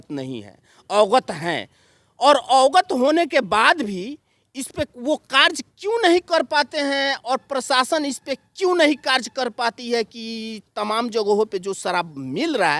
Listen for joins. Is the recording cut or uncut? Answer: uncut